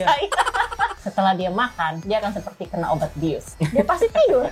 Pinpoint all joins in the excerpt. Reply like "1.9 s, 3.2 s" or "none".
1.0 s, 2.0 s, 3.5 s